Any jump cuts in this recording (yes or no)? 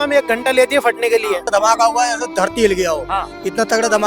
yes